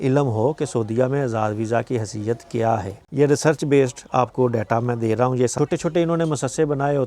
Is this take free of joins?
no; 2 cuts; at 3.0 s, 5.5 s

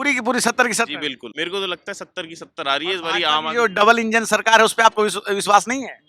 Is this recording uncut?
no; 1 cut; at 1.3 s

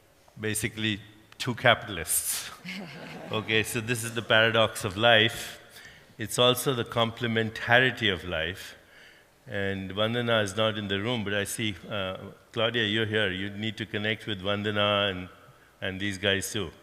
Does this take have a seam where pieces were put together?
yes; 1 cut; at 3.4 s

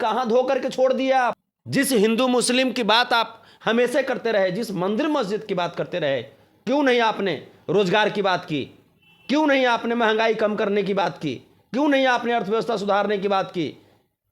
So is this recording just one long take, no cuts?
no; 1 cut; at 1.4 s

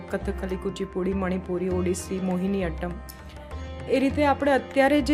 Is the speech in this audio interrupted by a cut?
no; 0 cuts

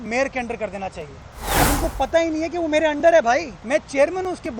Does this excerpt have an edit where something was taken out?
yes; 2 cuts; at 1.6 s, 3.6 s

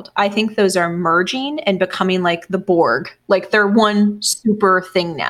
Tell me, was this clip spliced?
no; 0 cuts

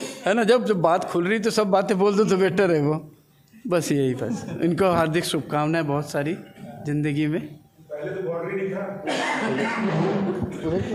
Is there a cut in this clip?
no; 0 cuts

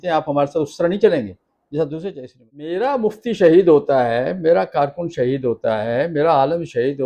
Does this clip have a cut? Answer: yes; 1 cut; at 2.8 s

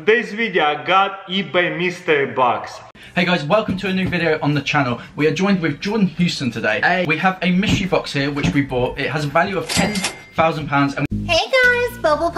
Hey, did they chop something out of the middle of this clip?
yes; 2 cuts; at 2.8 s, 11.1 s

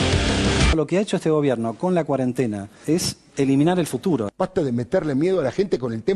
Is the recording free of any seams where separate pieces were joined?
no; 2 cuts; at 0.7 s, 4.3 s

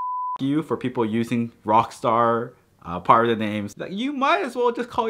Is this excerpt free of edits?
no; 1 cut; at 3.8 s

